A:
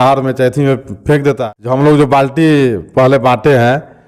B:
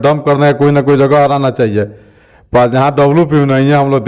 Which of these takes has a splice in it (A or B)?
A